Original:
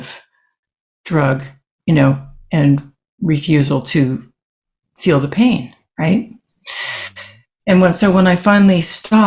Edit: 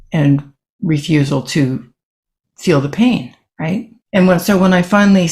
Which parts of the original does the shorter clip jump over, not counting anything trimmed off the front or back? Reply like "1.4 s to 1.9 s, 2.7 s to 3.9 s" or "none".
6.3 s to 7.4 s